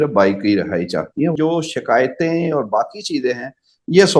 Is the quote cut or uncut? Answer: cut